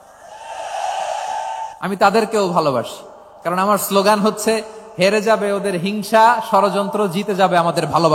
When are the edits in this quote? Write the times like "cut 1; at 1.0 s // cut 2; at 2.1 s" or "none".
cut 1; at 1.7 s

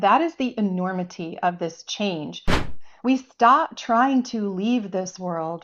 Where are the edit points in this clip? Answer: cut 1; at 2.7 s

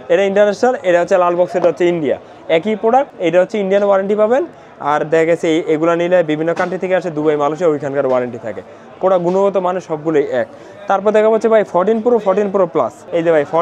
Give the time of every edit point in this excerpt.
none

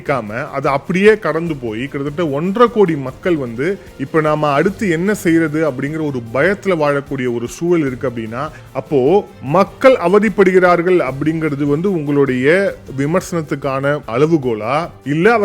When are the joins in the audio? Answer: cut 1; at 8.6 s

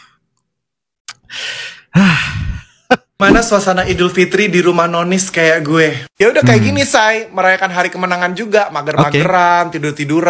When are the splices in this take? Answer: cut 1; at 3.1 s

